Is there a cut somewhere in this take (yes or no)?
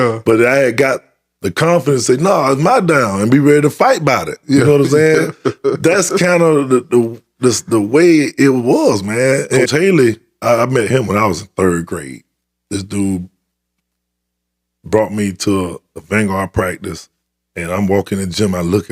yes